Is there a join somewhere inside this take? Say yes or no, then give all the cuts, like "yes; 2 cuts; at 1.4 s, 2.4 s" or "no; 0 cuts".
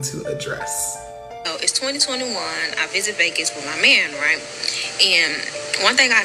no; 0 cuts